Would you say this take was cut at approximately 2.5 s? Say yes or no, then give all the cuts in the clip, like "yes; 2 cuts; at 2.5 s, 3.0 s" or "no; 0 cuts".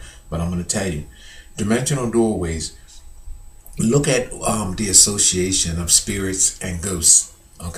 yes; 1 cut; at 2.5 s